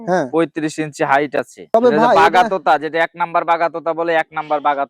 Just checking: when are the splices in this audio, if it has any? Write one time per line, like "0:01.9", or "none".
0:01.7